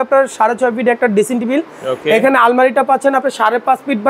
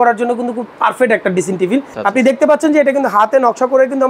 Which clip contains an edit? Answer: second; 1 cut; at 1.9 s

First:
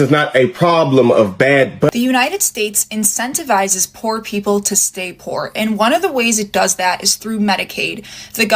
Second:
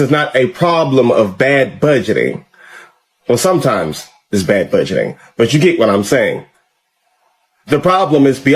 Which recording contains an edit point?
first; 1 cut; at 1.9 s

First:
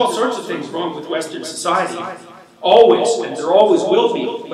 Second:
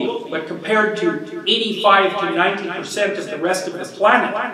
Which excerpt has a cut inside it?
second; 1 cut; at 1.3 s

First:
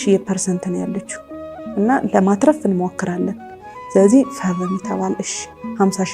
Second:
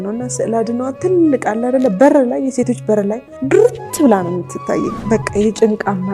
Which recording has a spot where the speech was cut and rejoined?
second; 2 cuts; at 3.3 s, 5.0 s

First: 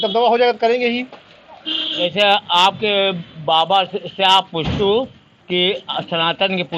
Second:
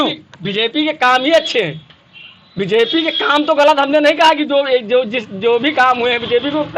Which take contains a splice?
first; 1 cut; at 2.0 s

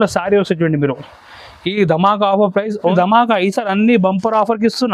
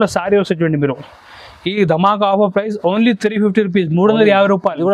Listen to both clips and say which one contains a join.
first; 1 cut; at 2.9 s

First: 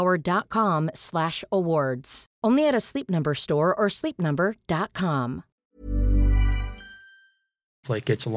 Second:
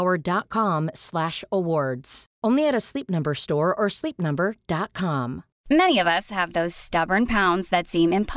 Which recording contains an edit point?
second; 1 cut; at 5.5 s

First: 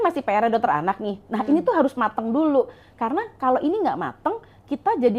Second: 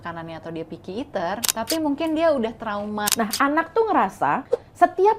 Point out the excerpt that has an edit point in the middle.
second; 3 cuts; at 1.5 s, 3.1 s, 4.4 s

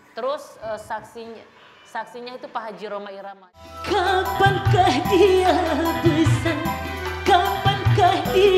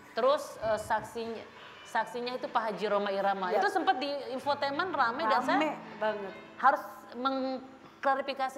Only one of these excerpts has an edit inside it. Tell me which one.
first; 1 cut; at 3.6 s

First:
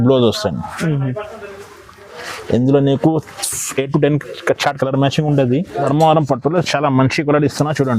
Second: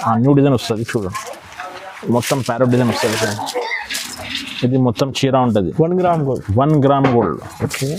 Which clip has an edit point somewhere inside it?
first; 1 cut; at 5.9 s

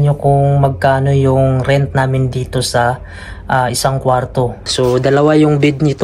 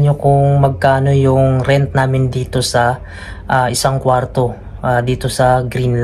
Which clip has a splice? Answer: first; 1 cut; at 4.6 s

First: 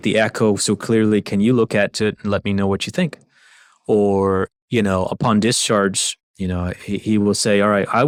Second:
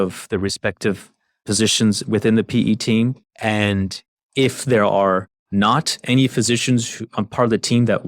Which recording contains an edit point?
second; 2 cuts; at 3.3 s, 5.4 s

